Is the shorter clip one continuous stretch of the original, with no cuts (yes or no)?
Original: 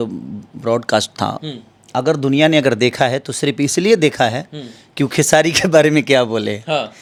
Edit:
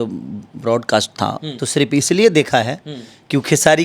no